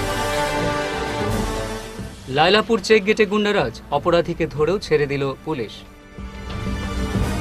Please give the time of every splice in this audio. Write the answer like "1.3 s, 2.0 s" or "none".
1.4 s